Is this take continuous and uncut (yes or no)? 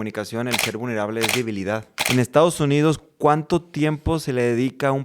no